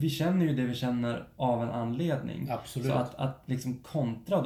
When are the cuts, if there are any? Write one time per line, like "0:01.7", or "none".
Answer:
none

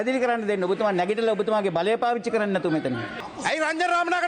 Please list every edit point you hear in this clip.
0:03.2

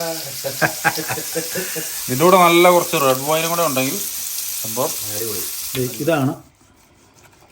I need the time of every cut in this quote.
0:05.6

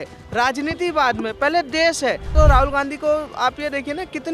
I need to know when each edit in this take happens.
0:02.3

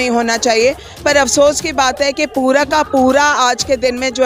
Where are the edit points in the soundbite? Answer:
none

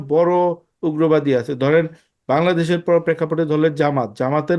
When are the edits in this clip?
none

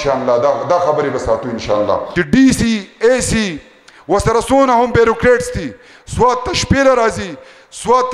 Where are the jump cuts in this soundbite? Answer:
0:02.1

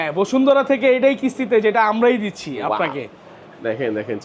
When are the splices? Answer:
none

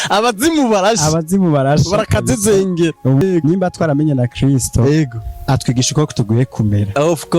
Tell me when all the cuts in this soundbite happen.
0:03.2

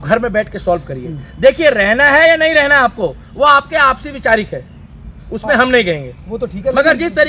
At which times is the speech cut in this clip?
none

